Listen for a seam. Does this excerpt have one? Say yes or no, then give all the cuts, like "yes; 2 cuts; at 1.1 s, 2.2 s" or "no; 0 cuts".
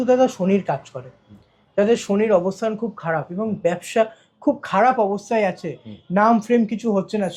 no; 0 cuts